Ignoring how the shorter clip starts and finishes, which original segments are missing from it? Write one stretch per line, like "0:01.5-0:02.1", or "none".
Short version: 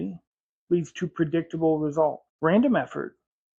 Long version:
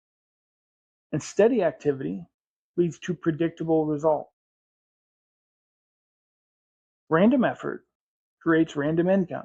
0:04.3-0:06.9